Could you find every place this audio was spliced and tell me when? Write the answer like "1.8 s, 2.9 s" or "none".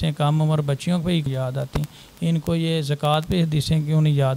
1.3 s